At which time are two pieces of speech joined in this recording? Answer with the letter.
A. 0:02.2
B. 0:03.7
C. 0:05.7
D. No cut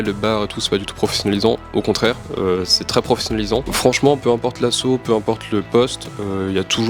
B